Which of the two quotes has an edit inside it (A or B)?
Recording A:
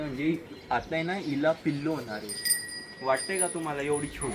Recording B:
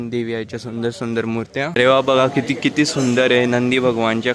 B